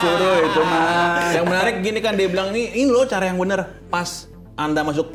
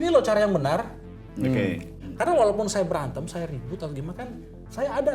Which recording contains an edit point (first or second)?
second